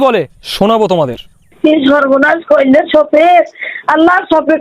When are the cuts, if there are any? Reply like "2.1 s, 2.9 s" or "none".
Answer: 1.5 s